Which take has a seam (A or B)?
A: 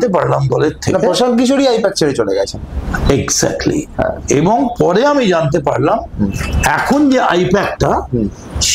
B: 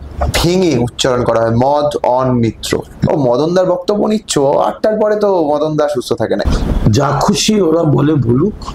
B